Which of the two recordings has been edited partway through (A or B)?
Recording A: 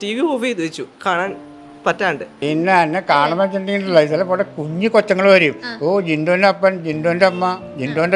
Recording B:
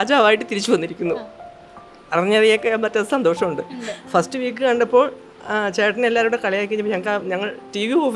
A